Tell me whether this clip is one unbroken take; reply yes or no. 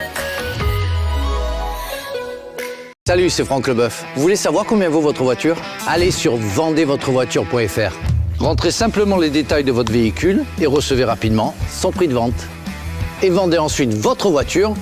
no